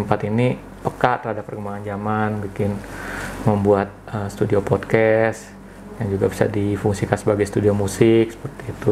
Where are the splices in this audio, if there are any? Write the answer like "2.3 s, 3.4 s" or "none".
none